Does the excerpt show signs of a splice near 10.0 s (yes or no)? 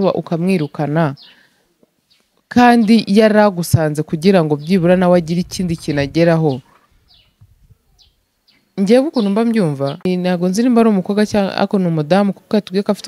yes